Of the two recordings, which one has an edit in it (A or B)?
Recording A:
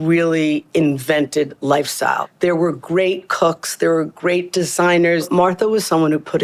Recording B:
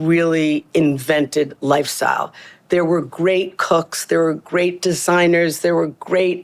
A